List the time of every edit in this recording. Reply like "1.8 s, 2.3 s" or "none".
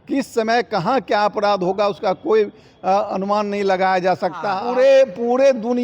4.6 s